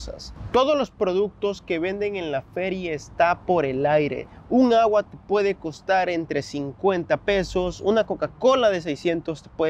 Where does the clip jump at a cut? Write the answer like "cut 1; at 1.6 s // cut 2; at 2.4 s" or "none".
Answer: none